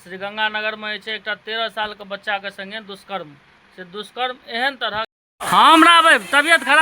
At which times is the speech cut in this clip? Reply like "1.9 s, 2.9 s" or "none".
5.2 s